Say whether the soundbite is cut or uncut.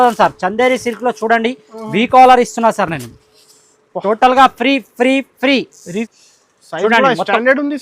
cut